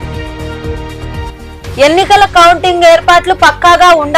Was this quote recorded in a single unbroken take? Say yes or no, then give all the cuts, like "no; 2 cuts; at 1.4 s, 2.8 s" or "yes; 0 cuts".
no; 1 cut; at 1.3 s